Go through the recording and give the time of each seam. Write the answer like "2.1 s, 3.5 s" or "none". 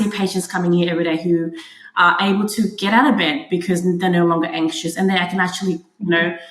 none